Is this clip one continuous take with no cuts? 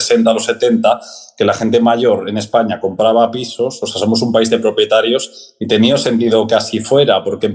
yes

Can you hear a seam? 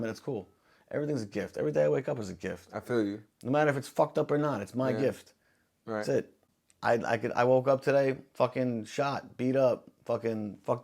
no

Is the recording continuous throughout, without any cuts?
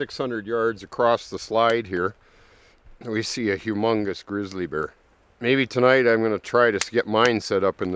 no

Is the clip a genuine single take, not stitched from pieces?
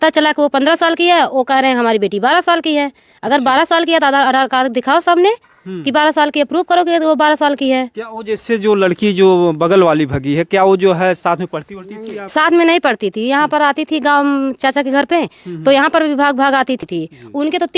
no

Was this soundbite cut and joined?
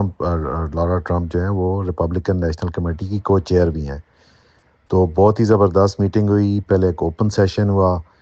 yes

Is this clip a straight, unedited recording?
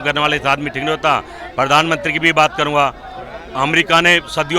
yes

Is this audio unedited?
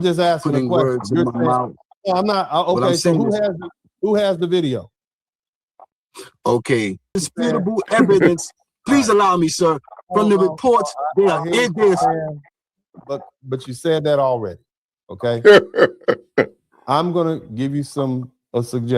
no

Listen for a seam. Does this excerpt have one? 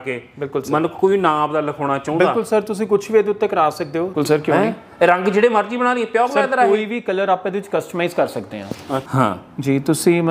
yes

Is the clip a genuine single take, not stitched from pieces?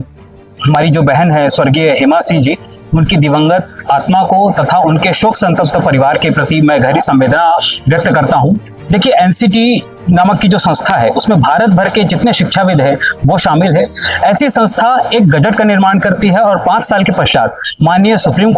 yes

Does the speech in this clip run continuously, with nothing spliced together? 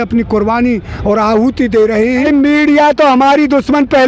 no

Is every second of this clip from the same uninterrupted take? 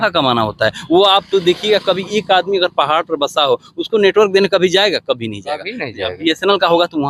yes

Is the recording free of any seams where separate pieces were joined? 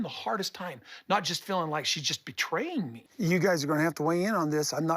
no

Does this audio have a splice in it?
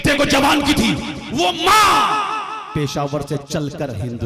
no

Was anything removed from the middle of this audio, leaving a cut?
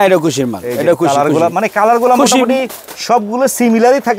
no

